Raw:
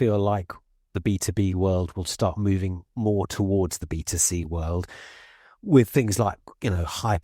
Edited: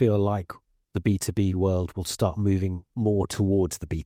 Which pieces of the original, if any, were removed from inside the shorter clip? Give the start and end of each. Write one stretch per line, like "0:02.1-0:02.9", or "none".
none